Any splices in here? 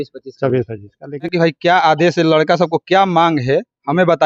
yes; 1 cut; at 1.3 s

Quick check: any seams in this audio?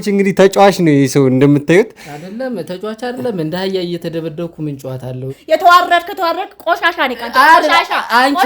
yes; 1 cut; at 5.4 s

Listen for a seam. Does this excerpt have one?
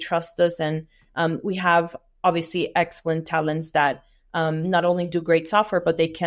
no; 0 cuts

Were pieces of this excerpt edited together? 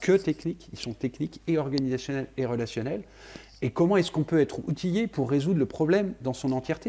no; 0 cuts

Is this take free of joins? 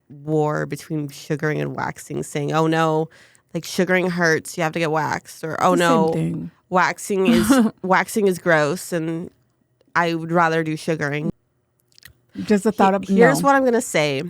no; 1 cut; at 11.3 s

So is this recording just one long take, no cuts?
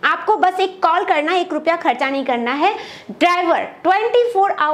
yes; 0 cuts

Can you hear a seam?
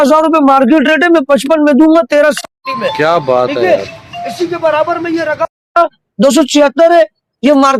no; 0 cuts

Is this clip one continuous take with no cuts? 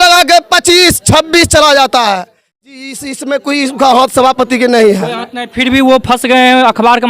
no; 1 cut; at 2.8 s

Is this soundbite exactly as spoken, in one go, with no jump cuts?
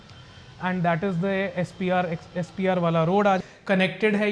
no; 1 cut; at 3.4 s

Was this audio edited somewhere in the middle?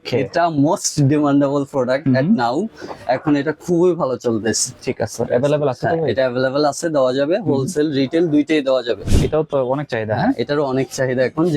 yes; 1 cut; at 9.1 s

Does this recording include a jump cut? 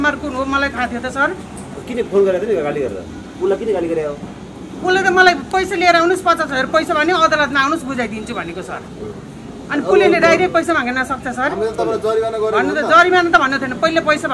no; 0 cuts

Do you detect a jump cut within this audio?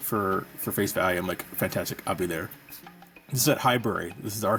no; 0 cuts

